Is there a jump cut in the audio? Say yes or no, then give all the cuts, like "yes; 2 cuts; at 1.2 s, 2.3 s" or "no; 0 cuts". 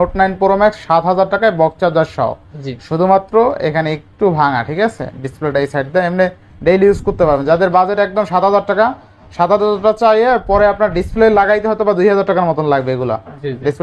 no; 0 cuts